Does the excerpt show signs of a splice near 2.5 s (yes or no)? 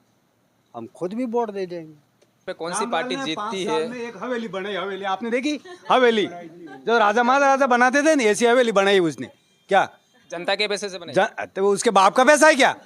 yes